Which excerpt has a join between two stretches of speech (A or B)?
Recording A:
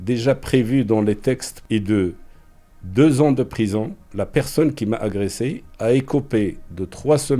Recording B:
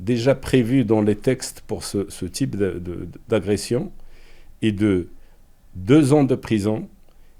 A